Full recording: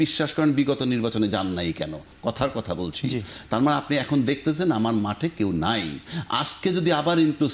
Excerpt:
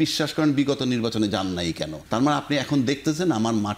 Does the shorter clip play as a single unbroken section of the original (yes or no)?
no